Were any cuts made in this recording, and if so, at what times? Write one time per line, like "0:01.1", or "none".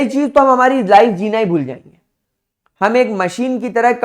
none